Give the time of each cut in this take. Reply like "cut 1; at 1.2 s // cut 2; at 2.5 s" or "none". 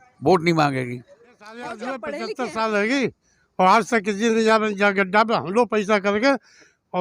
cut 1; at 1.7 s